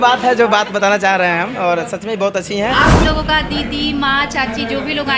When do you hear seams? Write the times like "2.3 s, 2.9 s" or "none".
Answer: 3.0 s